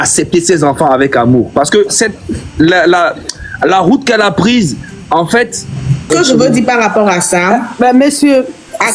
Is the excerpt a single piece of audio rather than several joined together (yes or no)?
no